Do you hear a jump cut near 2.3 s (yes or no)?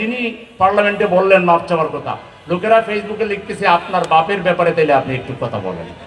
no